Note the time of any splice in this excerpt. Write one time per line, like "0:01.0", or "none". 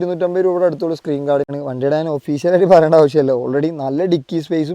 0:01.5